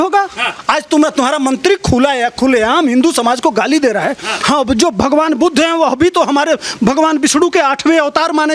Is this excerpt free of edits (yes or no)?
no